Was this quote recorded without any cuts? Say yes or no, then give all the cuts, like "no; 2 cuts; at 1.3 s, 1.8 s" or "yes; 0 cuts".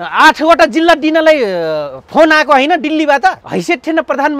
no; 1 cut; at 3.4 s